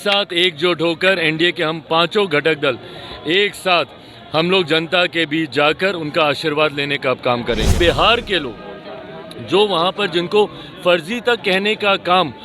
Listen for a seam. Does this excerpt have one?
yes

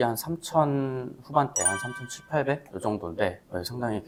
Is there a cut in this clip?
no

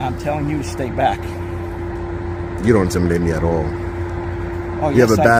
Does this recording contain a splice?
no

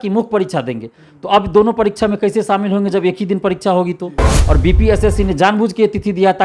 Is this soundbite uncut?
no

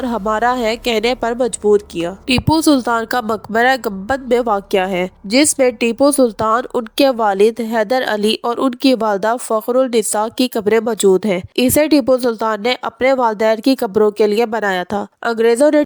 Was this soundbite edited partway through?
no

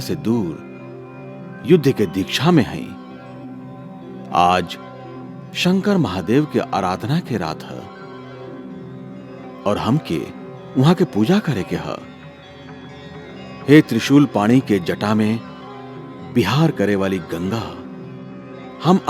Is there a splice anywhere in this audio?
no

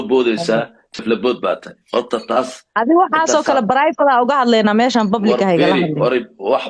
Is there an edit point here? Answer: yes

